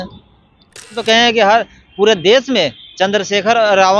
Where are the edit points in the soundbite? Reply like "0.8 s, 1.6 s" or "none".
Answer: 1.0 s